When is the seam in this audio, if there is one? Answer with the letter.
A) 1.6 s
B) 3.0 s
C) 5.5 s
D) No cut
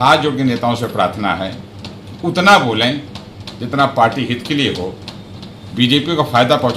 D